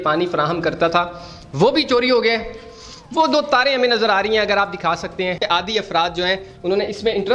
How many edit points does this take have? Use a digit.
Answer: 1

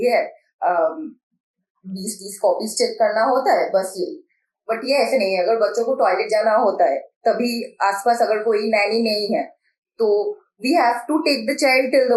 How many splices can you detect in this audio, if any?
0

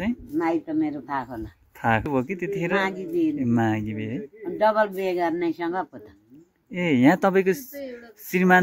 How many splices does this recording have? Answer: 1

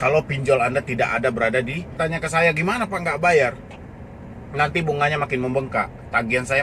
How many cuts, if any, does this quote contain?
1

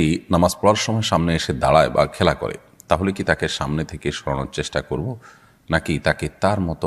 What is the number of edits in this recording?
0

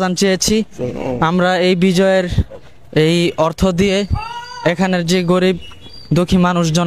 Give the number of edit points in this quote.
0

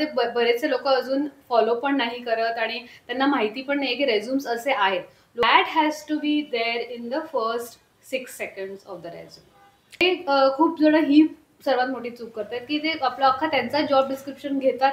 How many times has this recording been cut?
2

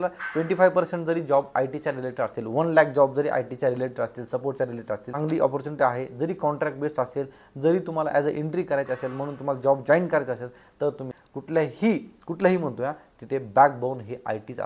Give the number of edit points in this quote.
2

